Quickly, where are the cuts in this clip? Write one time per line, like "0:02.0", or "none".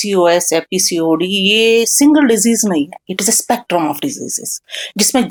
none